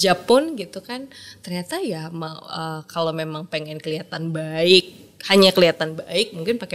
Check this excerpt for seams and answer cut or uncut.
uncut